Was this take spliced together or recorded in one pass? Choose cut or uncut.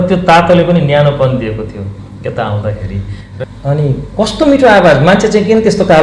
cut